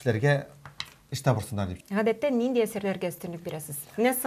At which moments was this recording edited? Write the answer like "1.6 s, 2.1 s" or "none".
1.8 s